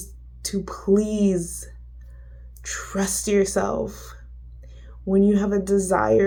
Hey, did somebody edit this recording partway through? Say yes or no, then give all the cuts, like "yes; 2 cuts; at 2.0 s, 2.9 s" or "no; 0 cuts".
no; 0 cuts